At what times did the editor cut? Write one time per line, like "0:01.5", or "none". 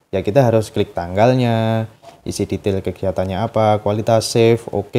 none